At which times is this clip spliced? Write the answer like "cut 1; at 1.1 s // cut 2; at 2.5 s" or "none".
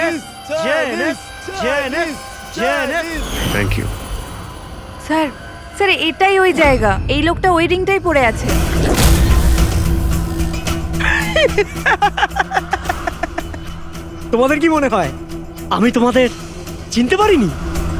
none